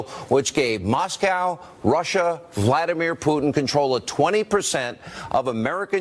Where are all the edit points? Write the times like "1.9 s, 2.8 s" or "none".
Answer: 2.8 s